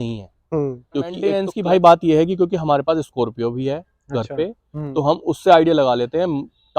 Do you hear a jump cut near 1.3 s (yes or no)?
yes